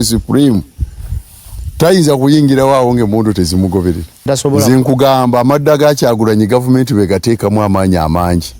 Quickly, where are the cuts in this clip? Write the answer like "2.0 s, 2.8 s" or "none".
4.3 s